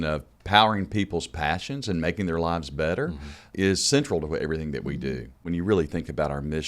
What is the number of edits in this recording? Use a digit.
1